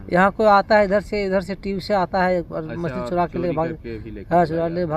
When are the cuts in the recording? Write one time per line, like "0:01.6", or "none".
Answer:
none